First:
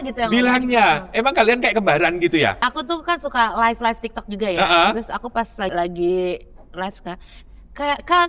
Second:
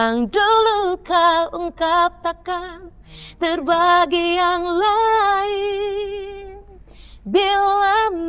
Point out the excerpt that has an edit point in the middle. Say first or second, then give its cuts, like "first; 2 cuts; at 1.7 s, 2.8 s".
first; 2 cuts; at 2.7 s, 5.7 s